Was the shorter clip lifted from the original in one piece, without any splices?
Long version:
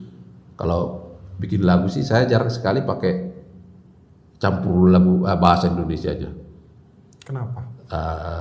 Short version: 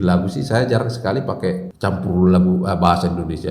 no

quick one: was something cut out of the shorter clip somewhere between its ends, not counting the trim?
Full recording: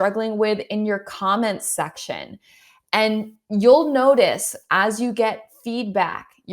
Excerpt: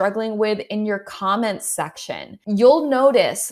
yes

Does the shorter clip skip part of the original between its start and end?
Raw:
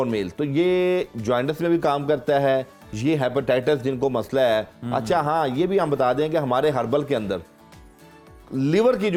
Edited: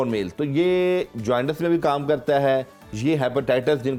no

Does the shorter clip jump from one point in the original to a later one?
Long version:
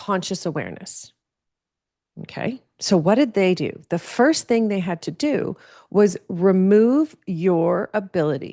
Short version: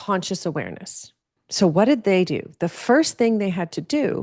yes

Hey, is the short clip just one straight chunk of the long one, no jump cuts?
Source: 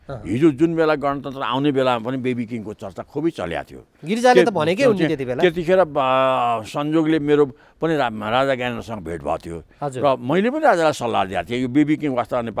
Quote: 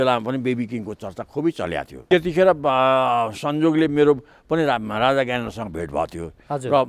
no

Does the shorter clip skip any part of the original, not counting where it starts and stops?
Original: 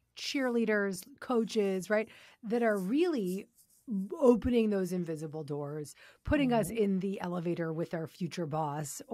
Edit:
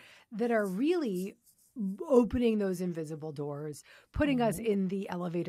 no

